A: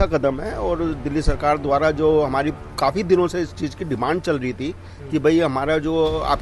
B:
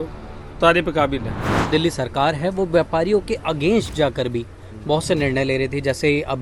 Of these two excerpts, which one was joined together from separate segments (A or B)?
B